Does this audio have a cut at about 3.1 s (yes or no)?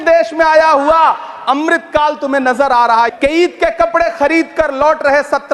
yes